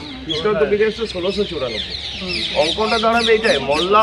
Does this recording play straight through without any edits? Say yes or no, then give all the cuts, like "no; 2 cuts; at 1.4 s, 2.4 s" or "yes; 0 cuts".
yes; 0 cuts